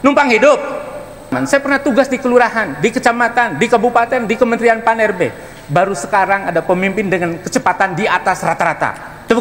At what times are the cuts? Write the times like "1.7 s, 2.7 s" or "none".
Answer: 1.3 s